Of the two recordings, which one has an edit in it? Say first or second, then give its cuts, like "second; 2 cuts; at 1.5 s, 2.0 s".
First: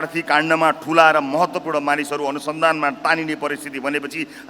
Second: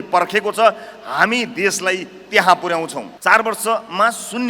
second; 1 cut; at 3.1 s